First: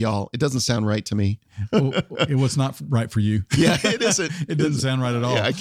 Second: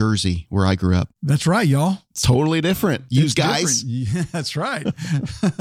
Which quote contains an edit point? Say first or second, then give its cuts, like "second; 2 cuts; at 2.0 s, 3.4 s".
second; 2 cuts; at 1.1 s, 3.0 s